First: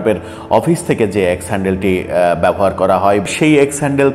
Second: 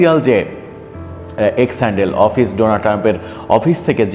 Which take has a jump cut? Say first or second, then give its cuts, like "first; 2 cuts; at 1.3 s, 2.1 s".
first; 1 cut; at 3.3 s